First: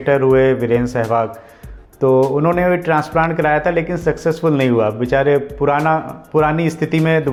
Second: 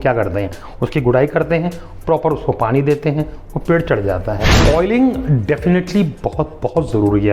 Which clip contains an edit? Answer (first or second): second